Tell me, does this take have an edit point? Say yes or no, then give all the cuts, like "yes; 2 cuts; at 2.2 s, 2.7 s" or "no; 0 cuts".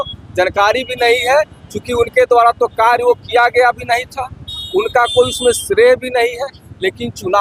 no; 0 cuts